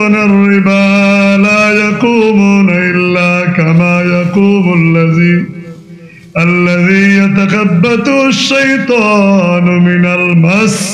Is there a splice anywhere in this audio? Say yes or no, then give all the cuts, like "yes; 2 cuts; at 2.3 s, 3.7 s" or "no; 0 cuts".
no; 0 cuts